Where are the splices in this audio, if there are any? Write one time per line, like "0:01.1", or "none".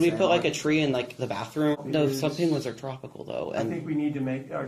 0:01.8